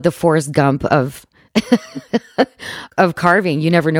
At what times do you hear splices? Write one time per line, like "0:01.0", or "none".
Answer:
0:02.8

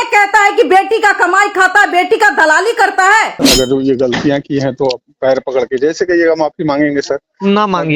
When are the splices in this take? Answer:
0:03.4

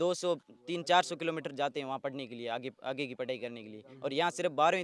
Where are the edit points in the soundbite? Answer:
none

